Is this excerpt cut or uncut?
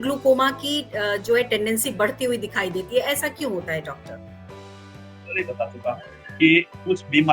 uncut